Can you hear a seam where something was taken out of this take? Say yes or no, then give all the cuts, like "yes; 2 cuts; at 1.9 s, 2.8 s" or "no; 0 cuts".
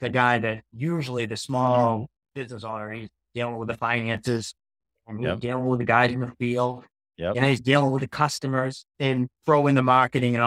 yes; 1 cut; at 8.8 s